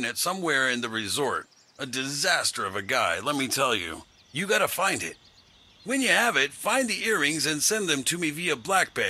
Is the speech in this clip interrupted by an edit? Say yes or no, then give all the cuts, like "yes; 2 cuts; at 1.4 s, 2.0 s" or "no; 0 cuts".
yes; 1 cut; at 8.1 s